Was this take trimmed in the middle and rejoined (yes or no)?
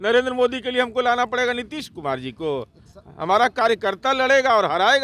no